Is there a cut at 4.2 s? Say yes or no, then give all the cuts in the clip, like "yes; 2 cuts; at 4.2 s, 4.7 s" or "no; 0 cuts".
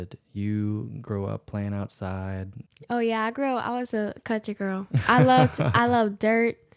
no; 1 cut; at 2.6 s